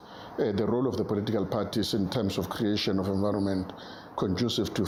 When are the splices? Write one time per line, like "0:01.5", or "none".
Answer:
none